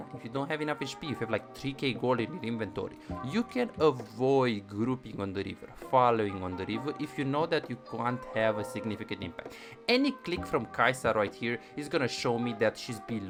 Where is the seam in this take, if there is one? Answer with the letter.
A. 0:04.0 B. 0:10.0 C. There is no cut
C